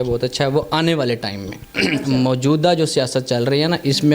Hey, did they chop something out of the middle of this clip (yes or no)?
no